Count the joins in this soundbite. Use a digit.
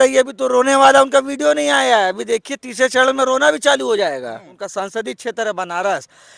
1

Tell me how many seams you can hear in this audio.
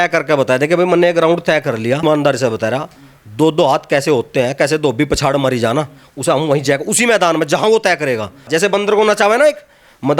2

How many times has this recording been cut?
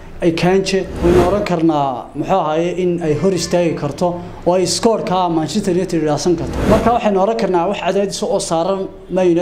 2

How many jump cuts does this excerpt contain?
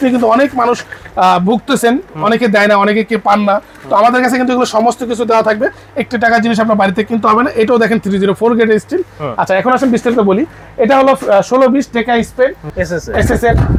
0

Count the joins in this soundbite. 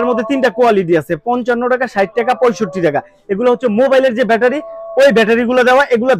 0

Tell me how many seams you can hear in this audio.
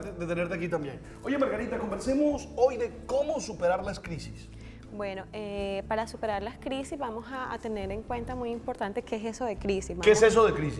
1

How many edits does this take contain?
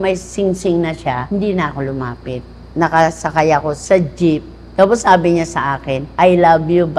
4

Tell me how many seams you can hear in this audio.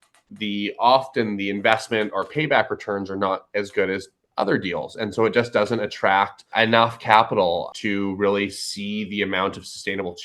2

